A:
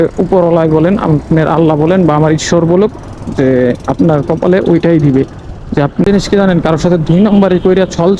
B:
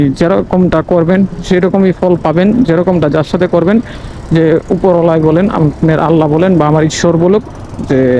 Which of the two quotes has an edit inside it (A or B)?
A